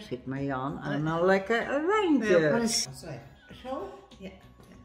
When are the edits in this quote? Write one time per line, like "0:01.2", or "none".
0:02.8